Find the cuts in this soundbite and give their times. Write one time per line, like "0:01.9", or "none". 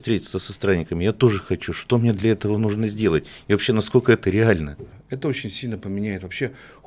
0:04.9